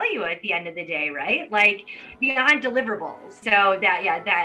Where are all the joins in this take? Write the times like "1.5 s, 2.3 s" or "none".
3.3 s